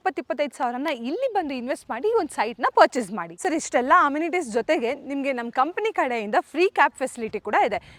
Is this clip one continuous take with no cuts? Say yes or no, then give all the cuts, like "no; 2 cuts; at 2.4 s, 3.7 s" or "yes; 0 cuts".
yes; 0 cuts